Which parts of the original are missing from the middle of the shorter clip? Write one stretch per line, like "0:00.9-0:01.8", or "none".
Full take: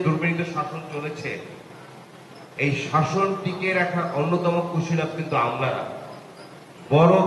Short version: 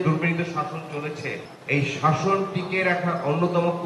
0:01.5-0:02.4